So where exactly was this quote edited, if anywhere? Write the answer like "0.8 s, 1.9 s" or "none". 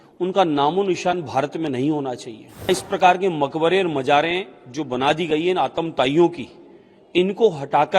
2.7 s